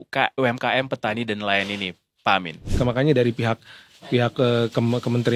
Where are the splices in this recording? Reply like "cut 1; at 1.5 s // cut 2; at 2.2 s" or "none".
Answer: cut 1; at 2.7 s